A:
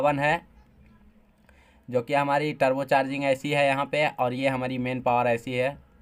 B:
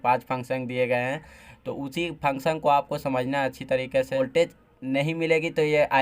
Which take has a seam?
B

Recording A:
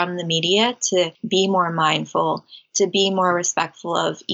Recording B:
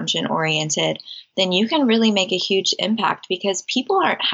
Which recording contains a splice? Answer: A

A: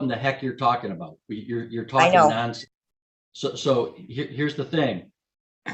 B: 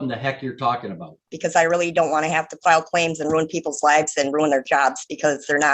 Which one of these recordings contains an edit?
B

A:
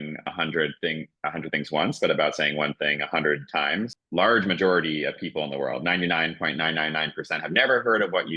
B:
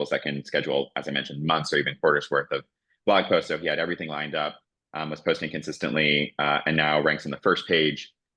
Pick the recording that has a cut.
A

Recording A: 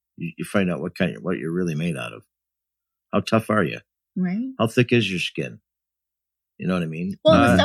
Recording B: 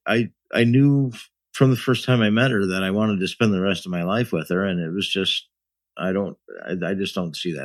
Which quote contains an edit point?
A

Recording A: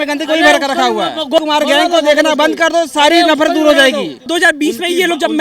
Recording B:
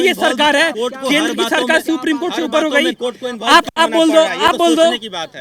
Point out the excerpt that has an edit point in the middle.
A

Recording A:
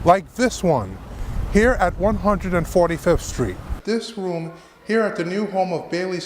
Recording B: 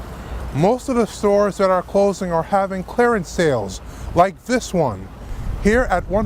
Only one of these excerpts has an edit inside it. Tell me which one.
A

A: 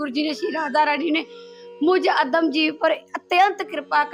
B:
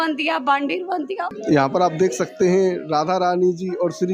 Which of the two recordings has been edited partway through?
B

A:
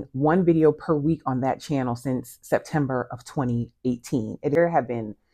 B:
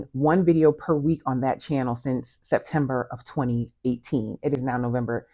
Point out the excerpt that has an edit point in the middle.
B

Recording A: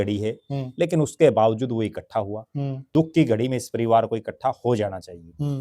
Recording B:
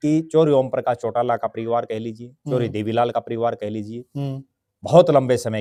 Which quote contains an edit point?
A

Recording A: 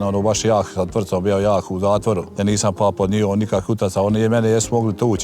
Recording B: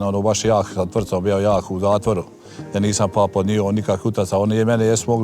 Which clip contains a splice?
A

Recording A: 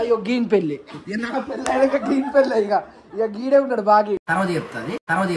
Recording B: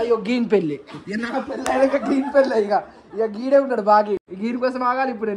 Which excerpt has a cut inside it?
A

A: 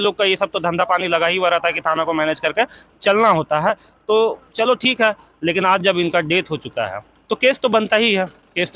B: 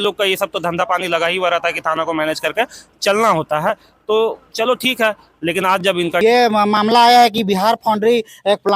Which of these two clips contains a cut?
B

